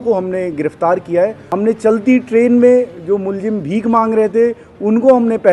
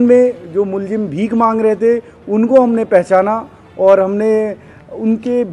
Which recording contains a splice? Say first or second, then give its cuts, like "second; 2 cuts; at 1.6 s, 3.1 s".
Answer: first; 1 cut; at 1.4 s